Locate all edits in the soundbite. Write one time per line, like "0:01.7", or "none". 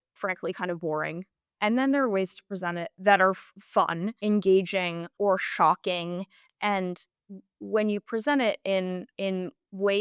0:02.9
0:04.1
0:05.0
0:09.1